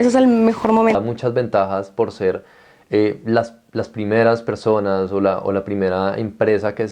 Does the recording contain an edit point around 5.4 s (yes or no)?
no